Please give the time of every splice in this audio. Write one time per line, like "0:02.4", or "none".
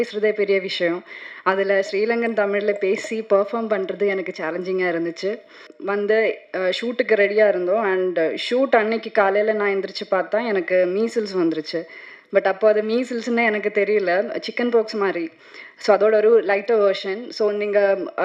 0:05.7

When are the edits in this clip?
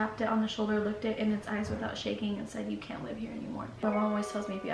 0:03.8

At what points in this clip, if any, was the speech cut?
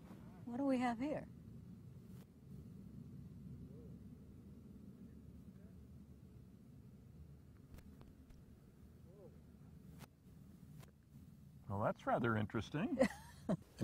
none

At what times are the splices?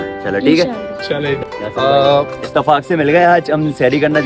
0:01.4

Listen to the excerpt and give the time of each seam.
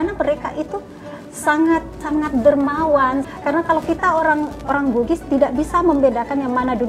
0:01.9
0:03.3

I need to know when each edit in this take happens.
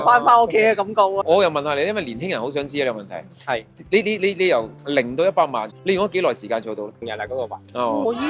0:01.2
0:05.7
0:07.0

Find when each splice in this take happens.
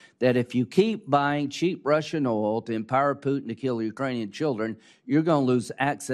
none

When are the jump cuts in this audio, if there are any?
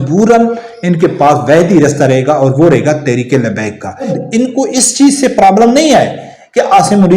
0:04.2

